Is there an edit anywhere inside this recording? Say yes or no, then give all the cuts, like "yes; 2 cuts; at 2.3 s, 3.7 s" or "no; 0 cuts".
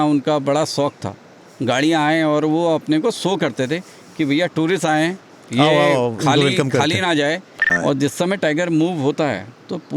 yes; 1 cut; at 7.7 s